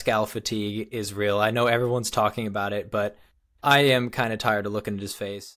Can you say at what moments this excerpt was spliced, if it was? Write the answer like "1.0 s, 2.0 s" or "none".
none

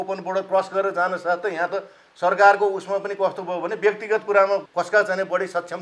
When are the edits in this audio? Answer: 4.7 s

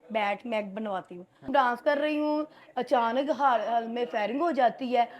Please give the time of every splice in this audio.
1.5 s

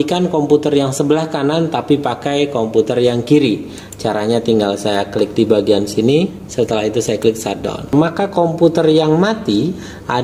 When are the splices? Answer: 6.4 s, 7.9 s

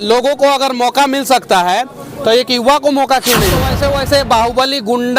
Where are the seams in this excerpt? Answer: 3.7 s

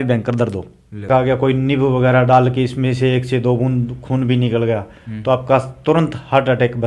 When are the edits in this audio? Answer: 1.1 s

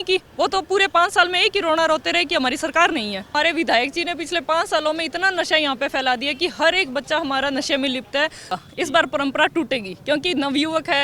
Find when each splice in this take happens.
3.3 s, 8.5 s

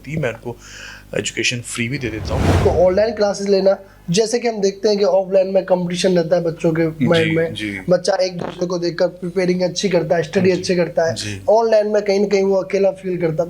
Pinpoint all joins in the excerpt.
2.5 s

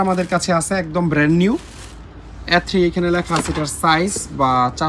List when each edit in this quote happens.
none

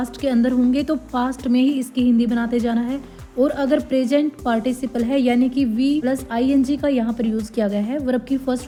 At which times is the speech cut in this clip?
none

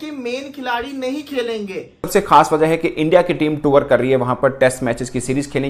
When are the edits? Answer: 2.1 s

